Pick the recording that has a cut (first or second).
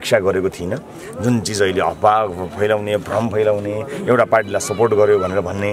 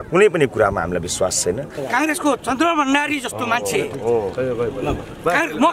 second